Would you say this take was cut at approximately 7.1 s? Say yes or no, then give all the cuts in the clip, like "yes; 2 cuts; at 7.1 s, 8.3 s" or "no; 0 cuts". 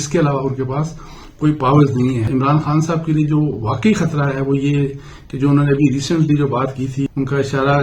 yes; 2 cuts; at 2.2 s, 7.1 s